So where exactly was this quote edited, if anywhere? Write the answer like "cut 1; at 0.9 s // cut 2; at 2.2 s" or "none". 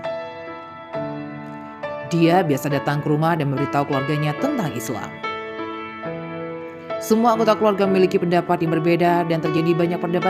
cut 1; at 5.3 s // cut 2; at 6.4 s

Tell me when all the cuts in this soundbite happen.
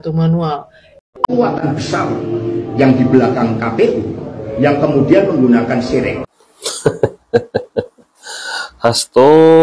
cut 1; at 1.3 s

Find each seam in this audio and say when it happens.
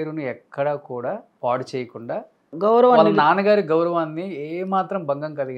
cut 1; at 1.3 s // cut 2; at 2.5 s

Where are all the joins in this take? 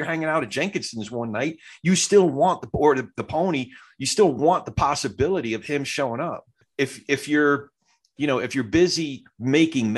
cut 1; at 6.6 s

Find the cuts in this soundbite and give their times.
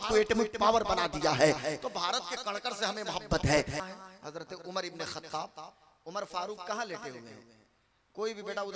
cut 1; at 3.8 s

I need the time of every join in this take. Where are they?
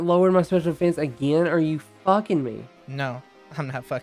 cut 1; at 2.8 s

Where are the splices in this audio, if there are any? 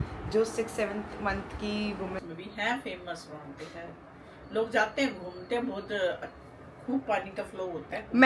cut 1; at 2.2 s

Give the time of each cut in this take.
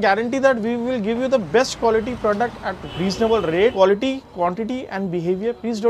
cut 1; at 2.8 s // cut 2; at 3.7 s

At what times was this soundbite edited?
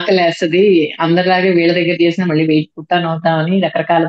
none

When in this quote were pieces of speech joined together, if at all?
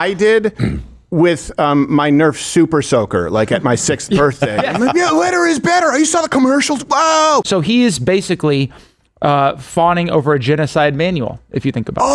cut 1; at 7.5 s

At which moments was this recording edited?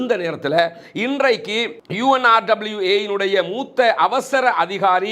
none

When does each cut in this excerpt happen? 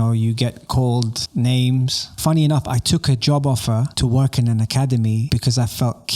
cut 1; at 1.2 s // cut 2; at 2.1 s // cut 3; at 3.9 s // cut 4; at 5.2 s

